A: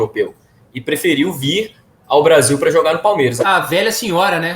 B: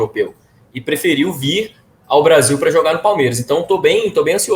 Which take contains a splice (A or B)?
A